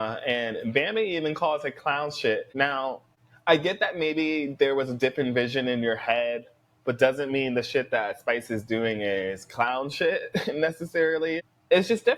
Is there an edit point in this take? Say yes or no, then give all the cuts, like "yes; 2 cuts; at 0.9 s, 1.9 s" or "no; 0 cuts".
no; 0 cuts